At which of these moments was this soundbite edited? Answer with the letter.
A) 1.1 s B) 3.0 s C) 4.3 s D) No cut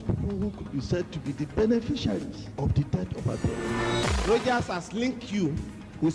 D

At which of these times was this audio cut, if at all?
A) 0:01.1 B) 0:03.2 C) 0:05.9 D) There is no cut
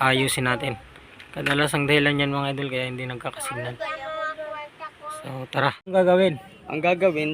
C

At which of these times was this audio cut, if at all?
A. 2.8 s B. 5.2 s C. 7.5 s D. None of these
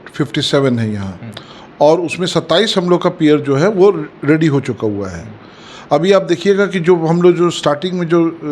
D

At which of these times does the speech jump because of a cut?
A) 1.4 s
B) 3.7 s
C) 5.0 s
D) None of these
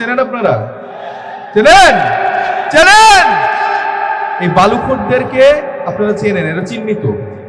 D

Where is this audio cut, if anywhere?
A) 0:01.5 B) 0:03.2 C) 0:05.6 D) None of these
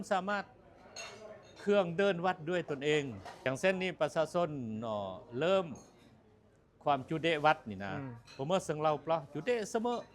B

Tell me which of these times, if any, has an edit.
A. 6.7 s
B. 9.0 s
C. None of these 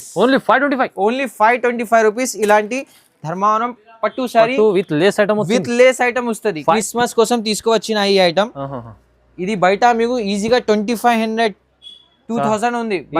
A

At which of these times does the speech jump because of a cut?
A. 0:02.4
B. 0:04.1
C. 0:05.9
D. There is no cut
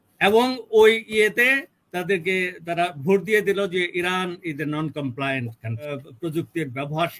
C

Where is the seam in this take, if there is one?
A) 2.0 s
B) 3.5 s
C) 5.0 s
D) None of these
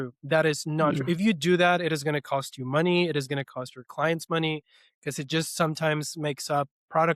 D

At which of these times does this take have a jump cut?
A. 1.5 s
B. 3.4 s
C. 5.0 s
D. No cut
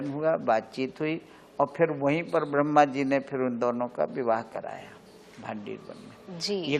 D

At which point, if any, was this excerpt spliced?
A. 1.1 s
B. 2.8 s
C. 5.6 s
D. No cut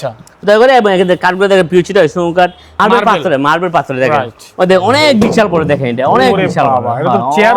B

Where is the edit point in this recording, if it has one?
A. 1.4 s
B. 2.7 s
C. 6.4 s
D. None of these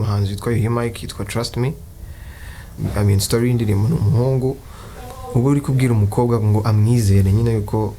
B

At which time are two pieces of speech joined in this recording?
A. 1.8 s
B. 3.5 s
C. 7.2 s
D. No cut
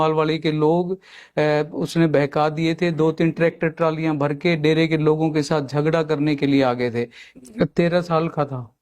C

